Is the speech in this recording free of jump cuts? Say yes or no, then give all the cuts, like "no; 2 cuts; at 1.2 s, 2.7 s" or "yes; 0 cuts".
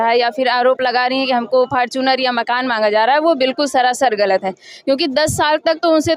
yes; 0 cuts